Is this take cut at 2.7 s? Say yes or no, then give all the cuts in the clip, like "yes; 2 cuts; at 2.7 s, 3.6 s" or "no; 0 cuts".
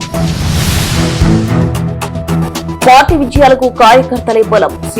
yes; 1 cut; at 2.7 s